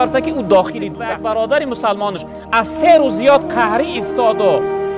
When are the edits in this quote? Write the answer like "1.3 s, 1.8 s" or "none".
0.9 s

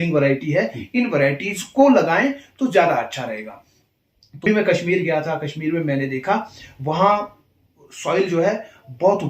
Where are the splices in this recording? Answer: 4.5 s

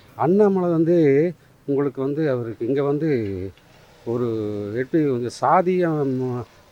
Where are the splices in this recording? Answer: none

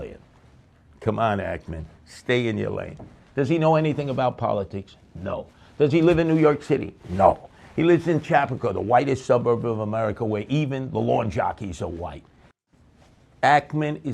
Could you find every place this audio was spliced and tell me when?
12.5 s

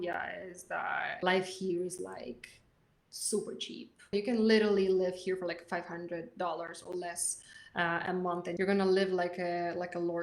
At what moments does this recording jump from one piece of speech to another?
1.2 s, 4.1 s, 8.5 s

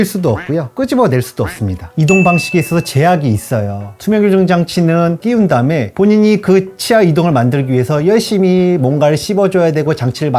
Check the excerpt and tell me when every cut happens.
3.9 s

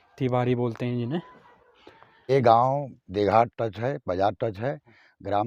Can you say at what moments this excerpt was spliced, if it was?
2.3 s

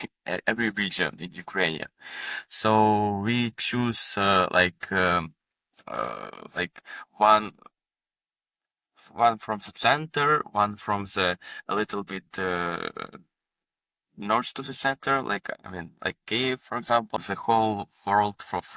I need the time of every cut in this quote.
17.2 s

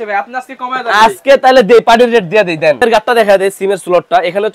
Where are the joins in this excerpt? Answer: 2.8 s

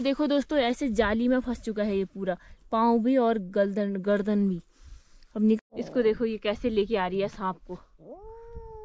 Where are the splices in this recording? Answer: 5.6 s

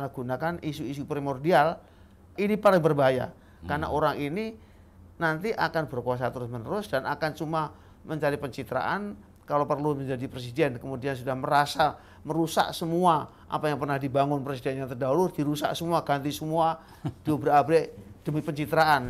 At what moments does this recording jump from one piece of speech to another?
2.3 s

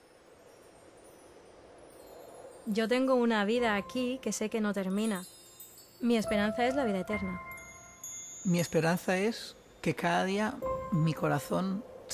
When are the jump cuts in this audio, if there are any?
none

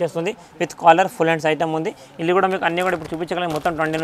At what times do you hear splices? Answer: none

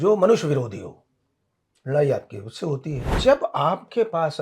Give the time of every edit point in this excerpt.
3.2 s

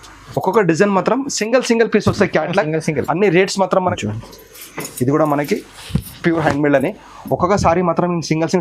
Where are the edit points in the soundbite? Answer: 4.0 s

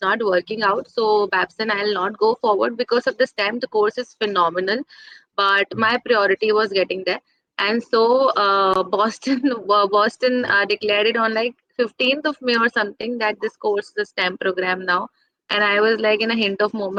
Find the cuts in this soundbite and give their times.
none

